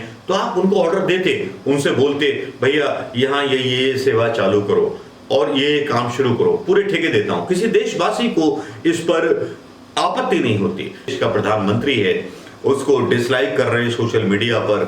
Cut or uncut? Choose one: cut